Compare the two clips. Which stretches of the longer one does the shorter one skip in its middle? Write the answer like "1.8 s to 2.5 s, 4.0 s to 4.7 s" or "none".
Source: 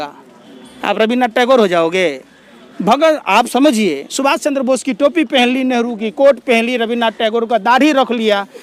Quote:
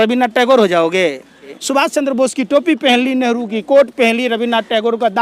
2.6 s to 4.1 s